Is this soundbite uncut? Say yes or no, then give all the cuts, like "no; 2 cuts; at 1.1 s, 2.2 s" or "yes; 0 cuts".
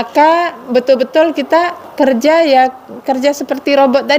no; 1 cut; at 1.8 s